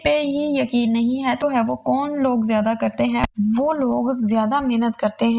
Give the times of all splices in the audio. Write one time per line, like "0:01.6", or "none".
0:01.4